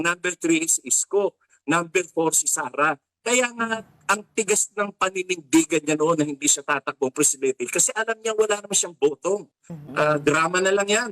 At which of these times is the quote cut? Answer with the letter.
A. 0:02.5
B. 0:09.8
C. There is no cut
B